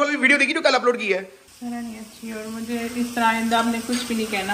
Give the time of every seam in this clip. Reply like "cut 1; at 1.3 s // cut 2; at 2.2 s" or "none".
cut 1; at 1.4 s